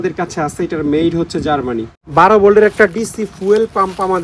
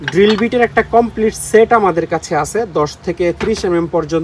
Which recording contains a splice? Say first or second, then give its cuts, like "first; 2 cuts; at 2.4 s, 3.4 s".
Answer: first; 1 cut; at 2.0 s